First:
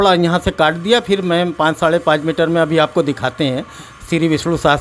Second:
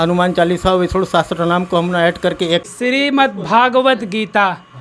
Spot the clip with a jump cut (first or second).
second